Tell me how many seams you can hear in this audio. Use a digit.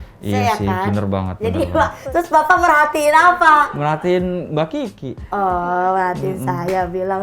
1